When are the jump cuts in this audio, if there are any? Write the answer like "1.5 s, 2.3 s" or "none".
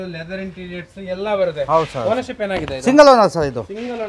none